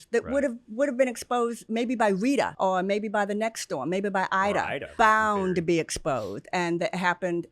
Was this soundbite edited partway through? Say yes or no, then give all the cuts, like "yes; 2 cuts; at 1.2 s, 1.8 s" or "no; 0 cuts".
yes; 3 cuts; at 1.6 s, 2.5 s, 4.8 s